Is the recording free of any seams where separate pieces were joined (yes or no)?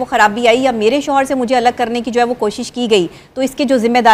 yes